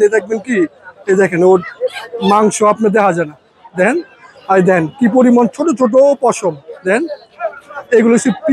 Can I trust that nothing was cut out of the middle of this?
yes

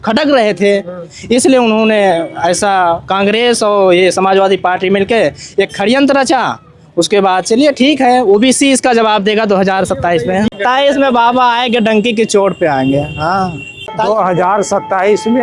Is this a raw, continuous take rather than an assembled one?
no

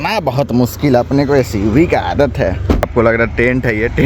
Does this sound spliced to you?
yes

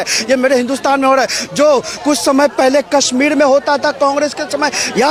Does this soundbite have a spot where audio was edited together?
no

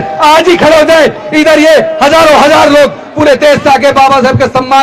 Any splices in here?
no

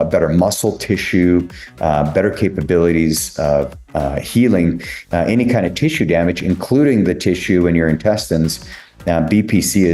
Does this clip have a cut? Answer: no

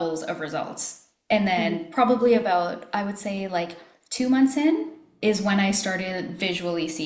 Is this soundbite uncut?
yes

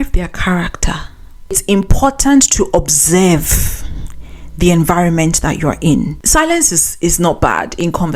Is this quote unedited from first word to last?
no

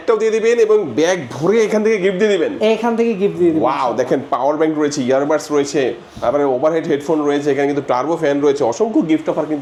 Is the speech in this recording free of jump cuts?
yes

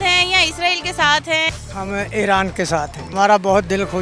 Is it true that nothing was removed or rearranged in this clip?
no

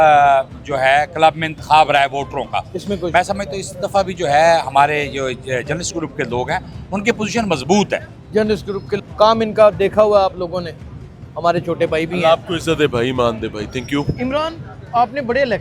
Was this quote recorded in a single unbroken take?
no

